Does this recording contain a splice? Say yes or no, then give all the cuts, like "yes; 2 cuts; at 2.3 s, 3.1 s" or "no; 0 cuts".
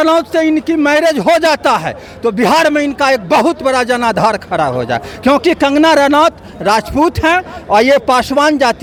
no; 0 cuts